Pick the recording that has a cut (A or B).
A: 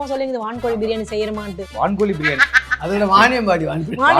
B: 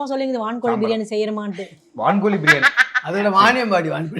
A